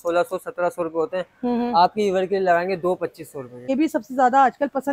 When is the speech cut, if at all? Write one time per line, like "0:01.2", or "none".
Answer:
0:03.7